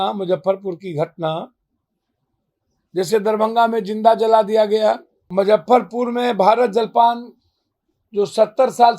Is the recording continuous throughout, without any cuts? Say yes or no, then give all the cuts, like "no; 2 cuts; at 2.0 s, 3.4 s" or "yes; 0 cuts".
no; 1 cut; at 5.2 s